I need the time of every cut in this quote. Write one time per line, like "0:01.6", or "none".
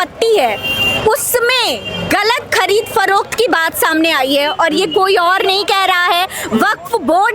none